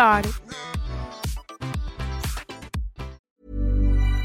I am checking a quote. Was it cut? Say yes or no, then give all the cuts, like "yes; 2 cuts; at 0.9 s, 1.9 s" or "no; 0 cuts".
yes; 1 cut; at 3.2 s